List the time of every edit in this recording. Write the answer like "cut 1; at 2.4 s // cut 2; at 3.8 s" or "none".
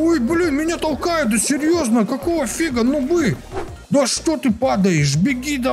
cut 1; at 3.5 s